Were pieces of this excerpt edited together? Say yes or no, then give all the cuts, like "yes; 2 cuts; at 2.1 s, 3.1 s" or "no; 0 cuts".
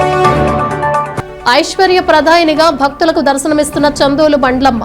no; 0 cuts